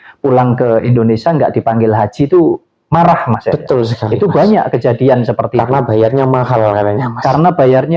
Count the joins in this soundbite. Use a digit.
0